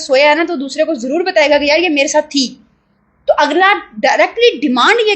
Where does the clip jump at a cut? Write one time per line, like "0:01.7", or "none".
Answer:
none

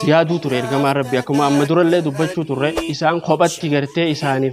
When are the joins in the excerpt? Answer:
0:02.8

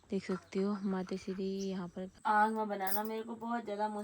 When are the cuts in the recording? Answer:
0:02.2

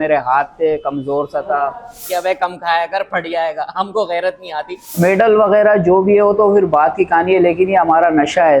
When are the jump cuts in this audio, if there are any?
0:02.1
0:04.8

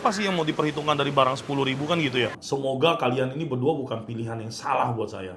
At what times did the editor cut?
0:02.4

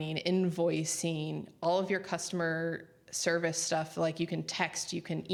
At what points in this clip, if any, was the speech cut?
none

